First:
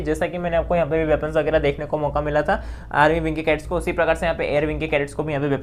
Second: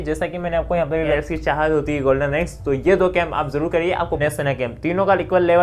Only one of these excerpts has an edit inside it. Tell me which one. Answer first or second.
second